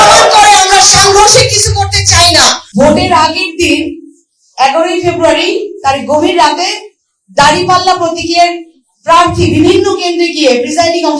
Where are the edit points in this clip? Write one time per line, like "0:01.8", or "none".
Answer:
0:02.6